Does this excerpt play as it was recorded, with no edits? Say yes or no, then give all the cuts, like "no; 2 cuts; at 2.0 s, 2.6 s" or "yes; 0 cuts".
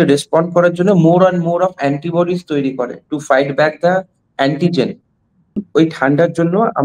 no; 1 cut; at 5.6 s